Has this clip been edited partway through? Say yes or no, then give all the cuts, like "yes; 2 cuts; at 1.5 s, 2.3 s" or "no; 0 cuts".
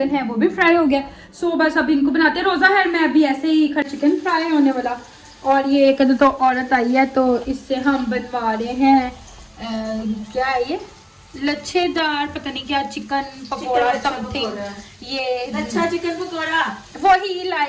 yes; 1 cut; at 3.9 s